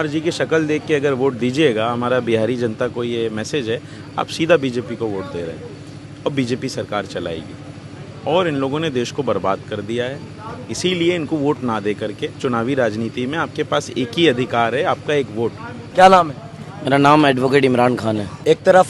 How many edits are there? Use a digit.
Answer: 0